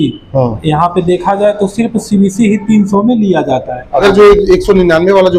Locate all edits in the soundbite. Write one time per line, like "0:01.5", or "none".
0:04.0

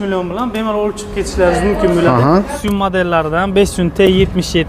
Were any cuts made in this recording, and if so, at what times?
0:02.6

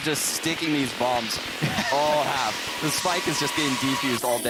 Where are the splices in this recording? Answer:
none

